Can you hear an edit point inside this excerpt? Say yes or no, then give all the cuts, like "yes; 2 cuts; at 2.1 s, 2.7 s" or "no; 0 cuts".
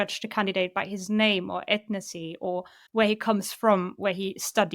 yes; 1 cut; at 2.8 s